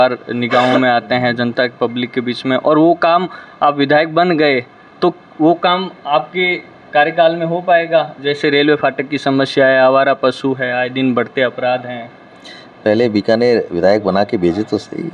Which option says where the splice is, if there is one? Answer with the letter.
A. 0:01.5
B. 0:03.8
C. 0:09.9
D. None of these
D